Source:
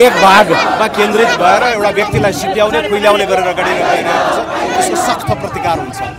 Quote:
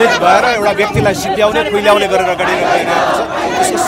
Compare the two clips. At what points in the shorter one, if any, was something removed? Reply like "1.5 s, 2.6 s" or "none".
none